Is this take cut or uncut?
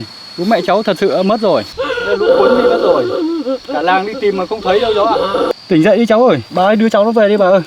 cut